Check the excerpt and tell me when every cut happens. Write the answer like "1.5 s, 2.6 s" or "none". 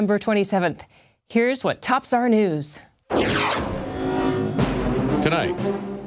none